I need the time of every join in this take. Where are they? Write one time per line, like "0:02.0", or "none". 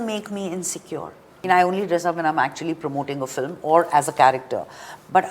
0:01.4